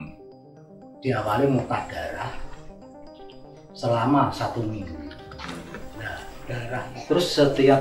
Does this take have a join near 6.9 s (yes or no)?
yes